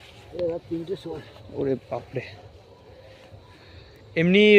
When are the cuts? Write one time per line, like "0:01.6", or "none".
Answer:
none

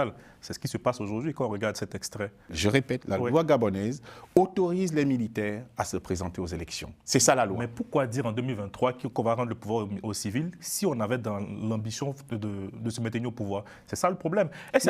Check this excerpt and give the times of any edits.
0:02.5

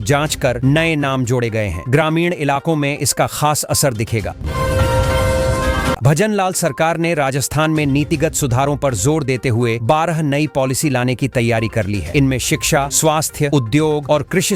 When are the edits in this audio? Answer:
0:04.4
0:06.0

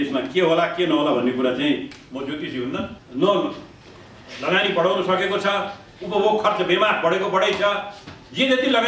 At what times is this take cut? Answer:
0:03.0

